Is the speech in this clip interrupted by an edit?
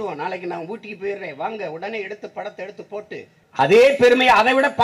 yes; 1 cut; at 3.4 s

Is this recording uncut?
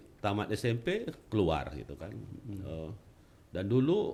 yes; 0 cuts

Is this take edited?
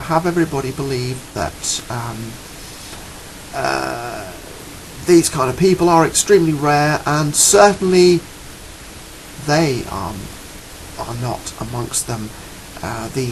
no; 0 cuts

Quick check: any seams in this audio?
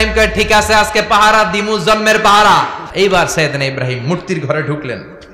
yes; 1 cut; at 2.8 s

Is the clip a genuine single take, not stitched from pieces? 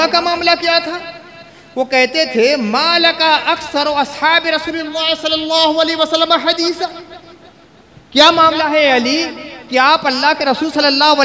yes; 0 cuts

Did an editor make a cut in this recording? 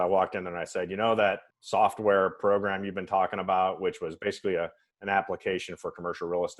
yes; 1 cut; at 1.5 s

